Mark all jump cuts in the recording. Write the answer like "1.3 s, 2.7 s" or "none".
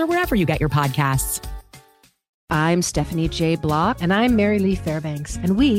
2.4 s